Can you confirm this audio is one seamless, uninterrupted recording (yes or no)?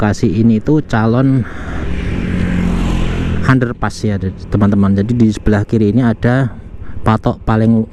yes